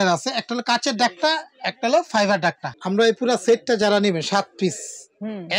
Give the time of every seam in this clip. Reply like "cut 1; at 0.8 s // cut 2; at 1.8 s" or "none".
cut 1; at 2.7 s